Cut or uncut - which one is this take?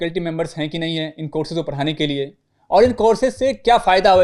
uncut